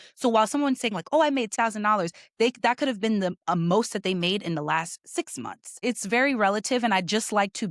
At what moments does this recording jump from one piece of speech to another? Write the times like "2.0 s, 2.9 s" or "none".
1.6 s, 5.8 s